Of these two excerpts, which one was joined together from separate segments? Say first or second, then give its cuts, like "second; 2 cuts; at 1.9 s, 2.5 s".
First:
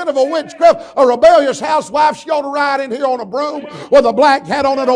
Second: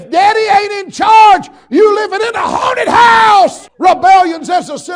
second; 1 cut; at 3.6 s